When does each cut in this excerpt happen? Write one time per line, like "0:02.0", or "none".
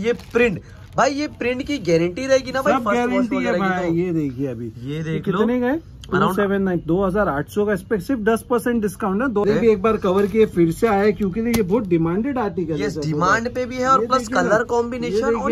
0:09.4